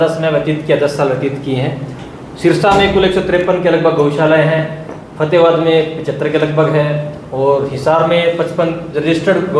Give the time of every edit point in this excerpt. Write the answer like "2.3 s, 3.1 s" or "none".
none